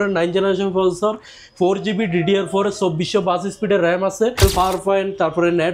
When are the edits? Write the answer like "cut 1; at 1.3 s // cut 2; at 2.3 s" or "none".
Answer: cut 1; at 4.4 s